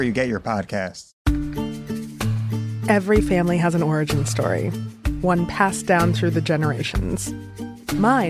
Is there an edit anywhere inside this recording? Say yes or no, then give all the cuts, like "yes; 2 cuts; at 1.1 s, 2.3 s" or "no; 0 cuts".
yes; 1 cut; at 1.1 s